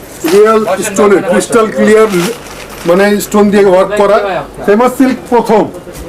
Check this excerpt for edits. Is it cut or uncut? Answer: cut